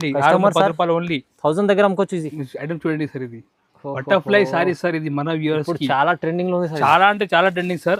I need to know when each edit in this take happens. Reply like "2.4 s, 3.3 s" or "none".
2.3 s